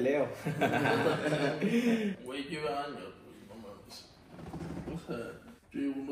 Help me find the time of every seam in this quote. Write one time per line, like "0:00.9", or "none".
0:02.2